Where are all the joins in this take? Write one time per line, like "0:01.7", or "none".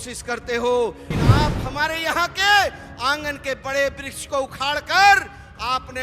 0:01.1